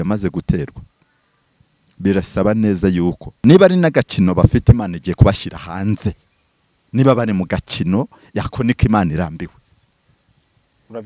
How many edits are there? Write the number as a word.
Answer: one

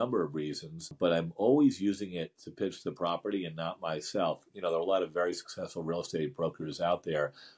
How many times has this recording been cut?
two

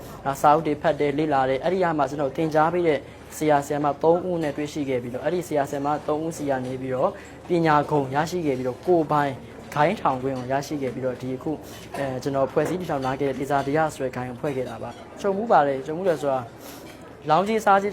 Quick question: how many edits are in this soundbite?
one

